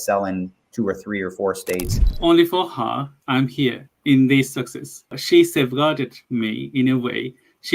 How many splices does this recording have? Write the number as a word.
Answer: two